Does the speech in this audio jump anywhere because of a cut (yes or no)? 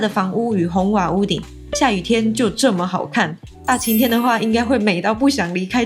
no